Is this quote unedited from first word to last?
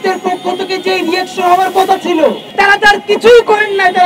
no; 1 cut; at 2.4 s

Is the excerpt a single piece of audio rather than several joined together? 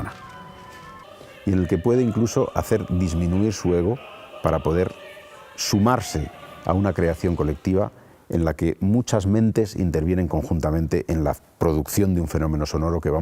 yes; 0 cuts

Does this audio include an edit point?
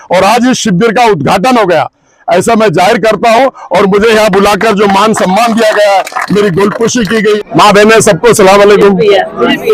yes; 1 cut; at 7.4 s

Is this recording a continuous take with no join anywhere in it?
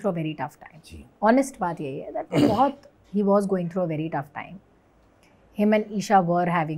yes; 0 cuts

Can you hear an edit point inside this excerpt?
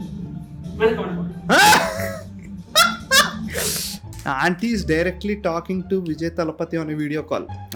no; 0 cuts

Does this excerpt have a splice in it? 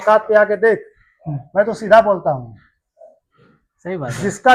no; 0 cuts

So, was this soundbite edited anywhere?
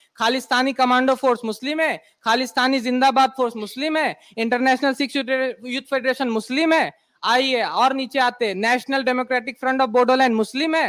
no; 0 cuts

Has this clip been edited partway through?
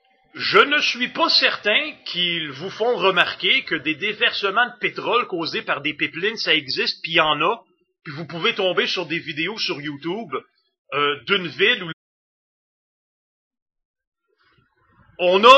no; 0 cuts

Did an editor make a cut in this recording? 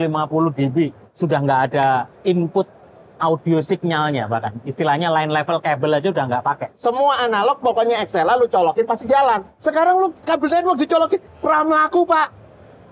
yes; 3 cuts; at 1.1 s, 6.7 s, 9.5 s

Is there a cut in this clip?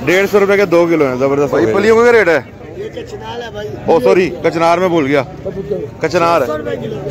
yes; 1 cut; at 1.6 s

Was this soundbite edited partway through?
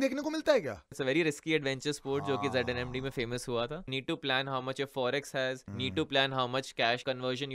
yes; 2 cuts; at 0.9 s, 3.9 s

